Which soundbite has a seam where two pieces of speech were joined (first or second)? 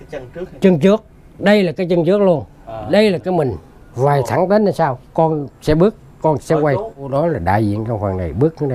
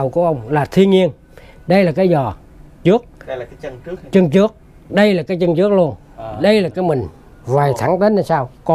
first